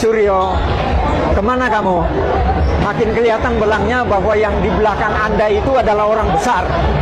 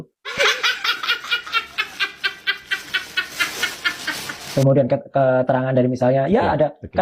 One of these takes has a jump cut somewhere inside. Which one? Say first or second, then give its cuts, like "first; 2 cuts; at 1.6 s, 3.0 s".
second; 1 cut; at 4.4 s